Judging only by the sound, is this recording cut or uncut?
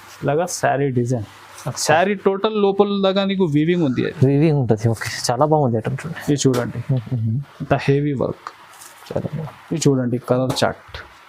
cut